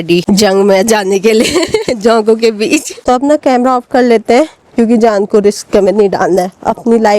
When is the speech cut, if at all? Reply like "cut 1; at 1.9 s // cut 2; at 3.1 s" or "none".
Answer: cut 1; at 3.0 s